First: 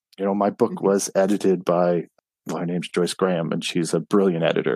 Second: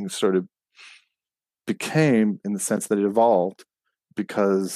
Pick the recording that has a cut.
first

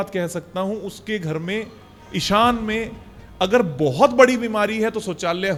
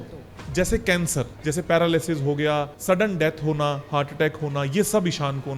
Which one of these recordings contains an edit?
second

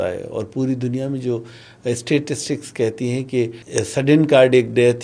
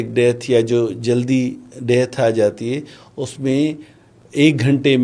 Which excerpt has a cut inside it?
first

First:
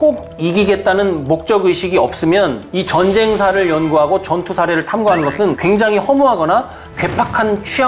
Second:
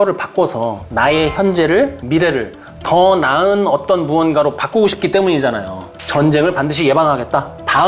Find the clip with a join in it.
second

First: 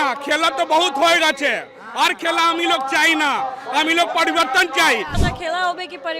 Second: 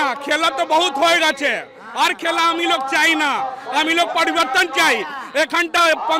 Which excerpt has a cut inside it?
first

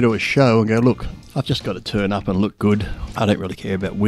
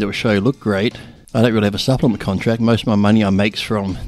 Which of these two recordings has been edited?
first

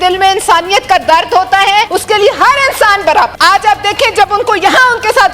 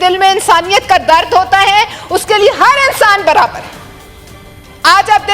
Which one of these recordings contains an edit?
first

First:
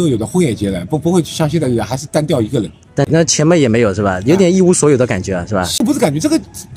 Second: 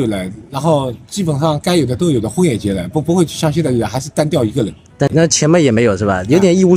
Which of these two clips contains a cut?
first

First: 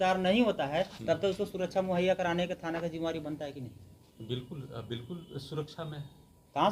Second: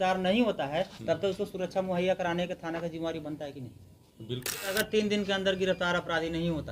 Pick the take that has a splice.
second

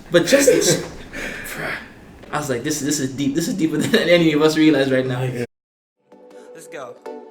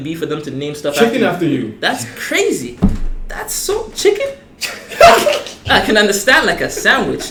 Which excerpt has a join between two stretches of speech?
first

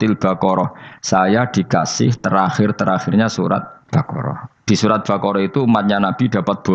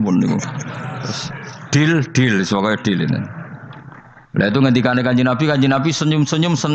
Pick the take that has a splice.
first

